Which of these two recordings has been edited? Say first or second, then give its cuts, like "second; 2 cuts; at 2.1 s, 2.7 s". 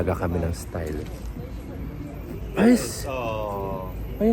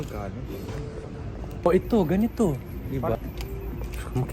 second; 2 cuts; at 1.6 s, 3.2 s